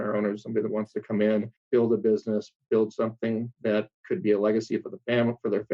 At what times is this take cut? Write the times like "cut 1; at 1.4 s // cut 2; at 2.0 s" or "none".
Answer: cut 1; at 1.6 s // cut 2; at 4.0 s